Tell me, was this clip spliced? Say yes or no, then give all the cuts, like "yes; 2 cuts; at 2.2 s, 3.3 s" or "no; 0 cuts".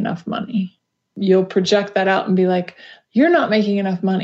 yes; 1 cut; at 1.0 s